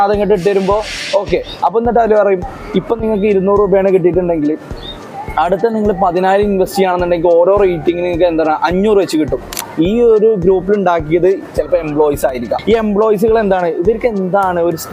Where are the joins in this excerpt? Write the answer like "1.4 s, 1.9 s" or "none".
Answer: 9.6 s, 12.6 s